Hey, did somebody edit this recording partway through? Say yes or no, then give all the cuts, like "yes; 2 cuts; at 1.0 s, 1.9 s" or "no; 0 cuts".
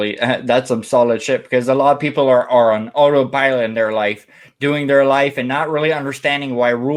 no; 0 cuts